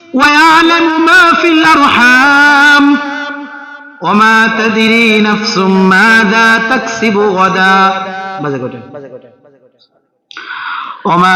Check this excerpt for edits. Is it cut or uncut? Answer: uncut